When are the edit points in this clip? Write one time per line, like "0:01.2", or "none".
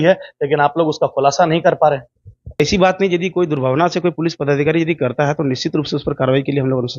0:02.6

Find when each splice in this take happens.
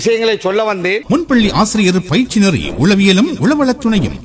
0:01.0

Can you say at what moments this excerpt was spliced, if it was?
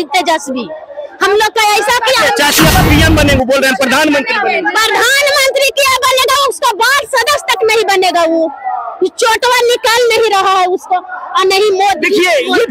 0:02.7

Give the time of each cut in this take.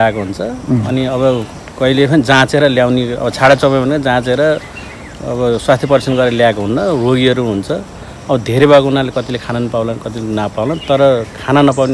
none

